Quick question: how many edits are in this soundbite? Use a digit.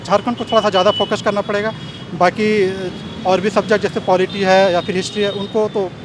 0